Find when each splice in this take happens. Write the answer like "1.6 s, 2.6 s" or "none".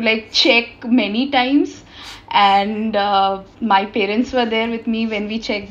none